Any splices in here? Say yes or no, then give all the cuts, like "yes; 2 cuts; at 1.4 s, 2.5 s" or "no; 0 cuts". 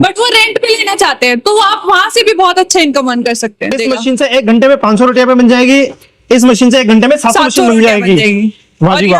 yes; 1 cut; at 3.8 s